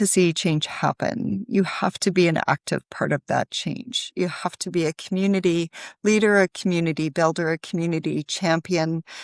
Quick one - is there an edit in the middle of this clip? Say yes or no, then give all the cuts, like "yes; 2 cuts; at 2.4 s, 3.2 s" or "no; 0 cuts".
no; 0 cuts